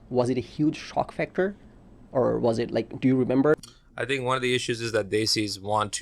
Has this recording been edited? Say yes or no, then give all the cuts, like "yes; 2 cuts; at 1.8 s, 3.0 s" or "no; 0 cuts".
yes; 1 cut; at 3.6 s